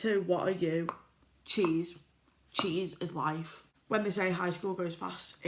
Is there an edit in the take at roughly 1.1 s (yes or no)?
no